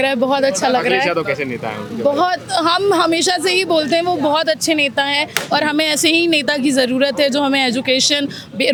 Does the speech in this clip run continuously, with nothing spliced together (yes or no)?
yes